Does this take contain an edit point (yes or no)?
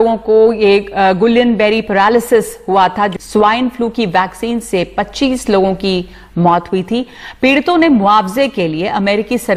yes